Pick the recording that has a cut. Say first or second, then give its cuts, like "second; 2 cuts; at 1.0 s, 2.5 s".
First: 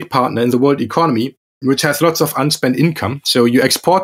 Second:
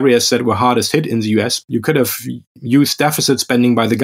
second; 1 cut; at 1.6 s